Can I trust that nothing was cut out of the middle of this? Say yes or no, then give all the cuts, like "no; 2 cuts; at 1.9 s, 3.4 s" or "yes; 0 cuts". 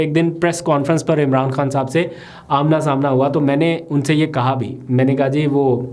yes; 0 cuts